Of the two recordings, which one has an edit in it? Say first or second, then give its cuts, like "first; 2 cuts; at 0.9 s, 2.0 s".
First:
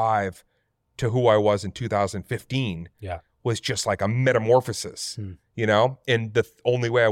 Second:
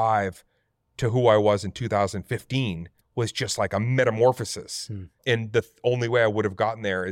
second; 2 cuts; at 3.0 s, 5.2 s